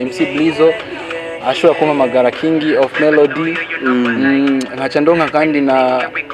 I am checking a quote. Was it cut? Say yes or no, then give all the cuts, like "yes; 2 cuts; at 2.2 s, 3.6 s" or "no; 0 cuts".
no; 0 cuts